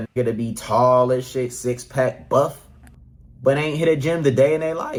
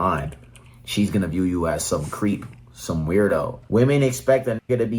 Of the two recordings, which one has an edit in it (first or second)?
second